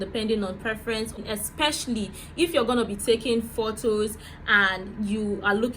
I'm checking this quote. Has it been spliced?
yes; 1 cut; at 1.2 s

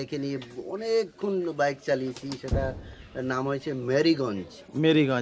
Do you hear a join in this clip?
no; 0 cuts

